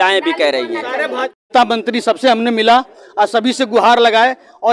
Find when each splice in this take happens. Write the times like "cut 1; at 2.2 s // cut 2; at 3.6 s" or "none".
cut 1; at 1.5 s